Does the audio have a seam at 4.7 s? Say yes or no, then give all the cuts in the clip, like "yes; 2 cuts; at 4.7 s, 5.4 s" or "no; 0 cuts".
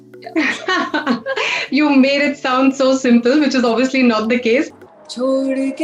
yes; 1 cut; at 4.7 s